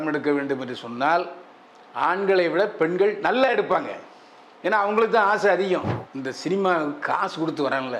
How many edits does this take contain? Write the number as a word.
one